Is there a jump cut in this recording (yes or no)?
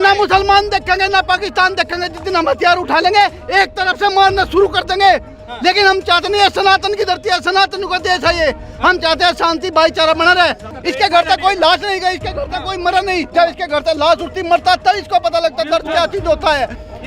yes